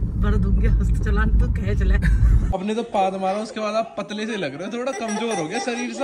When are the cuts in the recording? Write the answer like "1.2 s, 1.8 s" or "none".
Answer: 2.5 s